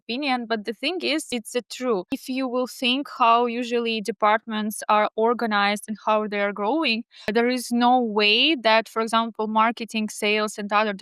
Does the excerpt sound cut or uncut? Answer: cut